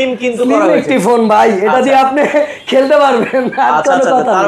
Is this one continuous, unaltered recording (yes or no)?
yes